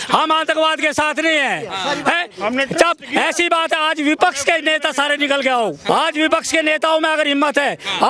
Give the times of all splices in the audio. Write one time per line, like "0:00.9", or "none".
0:05.9